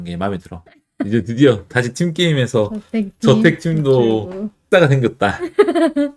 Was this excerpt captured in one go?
no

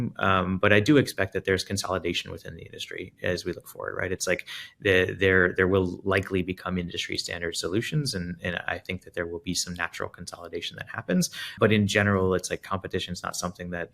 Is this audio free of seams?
no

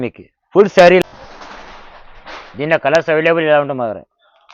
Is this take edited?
yes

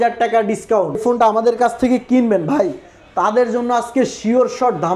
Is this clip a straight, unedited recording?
no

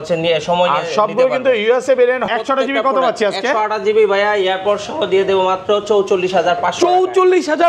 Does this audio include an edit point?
yes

